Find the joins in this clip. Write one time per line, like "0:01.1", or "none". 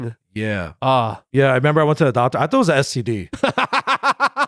0:01.2